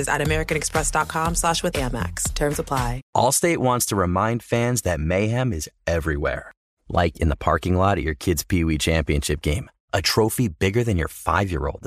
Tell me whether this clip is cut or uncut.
cut